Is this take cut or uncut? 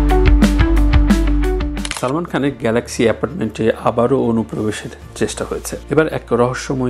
cut